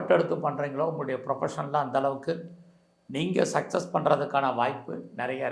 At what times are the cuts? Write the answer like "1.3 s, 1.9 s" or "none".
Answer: none